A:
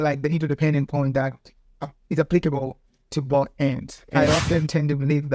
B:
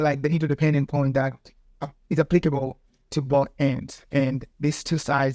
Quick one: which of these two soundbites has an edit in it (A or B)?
A